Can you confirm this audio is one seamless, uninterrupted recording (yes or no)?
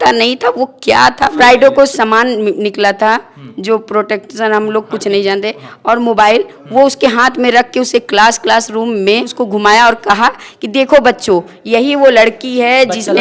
no